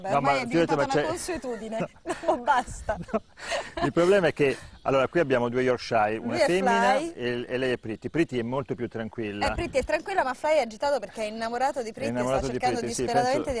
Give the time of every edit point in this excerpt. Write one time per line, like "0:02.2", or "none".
0:05.0